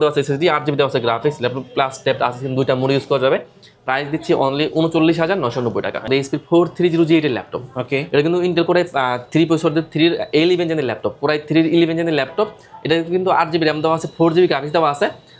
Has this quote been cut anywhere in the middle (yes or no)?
yes